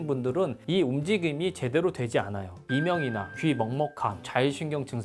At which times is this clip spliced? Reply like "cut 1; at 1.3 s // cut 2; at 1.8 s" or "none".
cut 1; at 2.6 s